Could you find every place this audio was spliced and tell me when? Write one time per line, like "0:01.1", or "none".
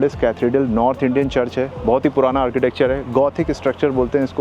none

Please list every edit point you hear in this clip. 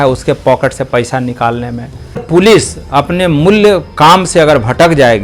0:02.2

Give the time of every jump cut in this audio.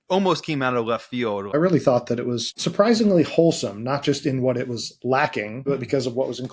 0:01.5
0:02.6
0:05.6

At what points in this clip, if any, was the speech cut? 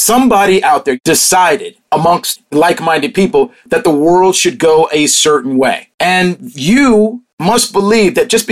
0:01.0
0:02.1
0:05.9
0:07.3

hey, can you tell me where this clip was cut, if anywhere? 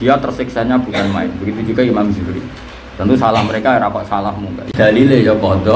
0:04.7

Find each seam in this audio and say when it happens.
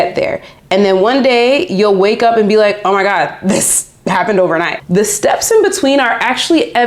0:04.8

